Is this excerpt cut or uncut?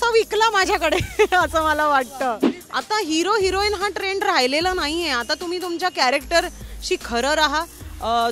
cut